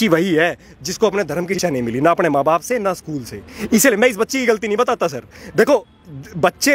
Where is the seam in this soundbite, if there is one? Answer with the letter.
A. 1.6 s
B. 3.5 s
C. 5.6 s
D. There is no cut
A